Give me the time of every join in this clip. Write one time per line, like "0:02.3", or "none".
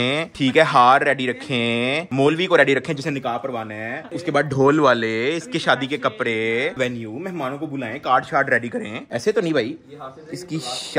none